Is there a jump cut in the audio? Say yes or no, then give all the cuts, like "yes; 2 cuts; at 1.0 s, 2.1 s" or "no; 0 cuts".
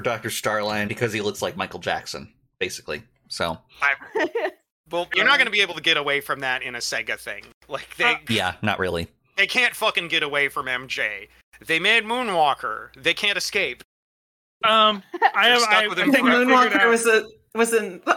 yes; 3 cuts; at 0.9 s, 5.1 s, 9.3 s